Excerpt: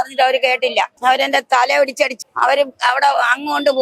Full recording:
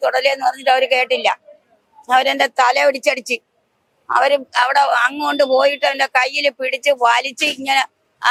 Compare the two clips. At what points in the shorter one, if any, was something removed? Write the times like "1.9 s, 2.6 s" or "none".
0.9 s, 2.2 s